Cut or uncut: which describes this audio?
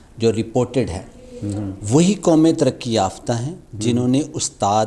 uncut